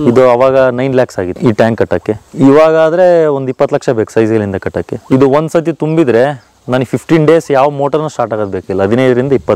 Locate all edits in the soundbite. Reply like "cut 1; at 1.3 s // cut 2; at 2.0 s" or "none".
cut 1; at 1.4 s // cut 2; at 2.3 s // cut 3; at 5.0 s